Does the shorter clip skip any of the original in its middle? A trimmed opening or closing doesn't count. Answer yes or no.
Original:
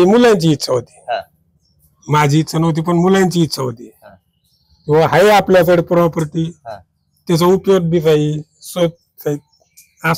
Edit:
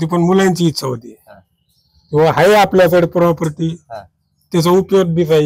no